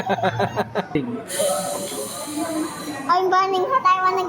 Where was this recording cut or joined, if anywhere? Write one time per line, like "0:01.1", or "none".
0:01.0